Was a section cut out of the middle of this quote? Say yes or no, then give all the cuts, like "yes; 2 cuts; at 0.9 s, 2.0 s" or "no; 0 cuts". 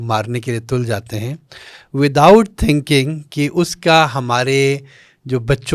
no; 0 cuts